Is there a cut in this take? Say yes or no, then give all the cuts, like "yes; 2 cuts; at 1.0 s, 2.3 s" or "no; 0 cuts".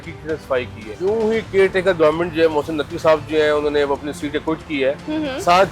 yes; 1 cut; at 0.9 s